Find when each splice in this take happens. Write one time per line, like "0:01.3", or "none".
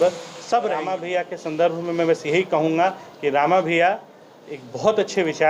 0:01.0